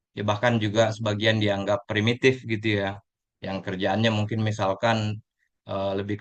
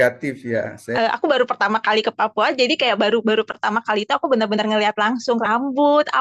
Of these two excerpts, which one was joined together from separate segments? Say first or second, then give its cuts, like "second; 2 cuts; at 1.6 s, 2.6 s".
second; 1 cut; at 0.9 s